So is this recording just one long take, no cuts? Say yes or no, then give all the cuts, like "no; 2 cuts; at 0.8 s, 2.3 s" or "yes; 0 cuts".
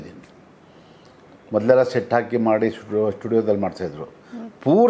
yes; 0 cuts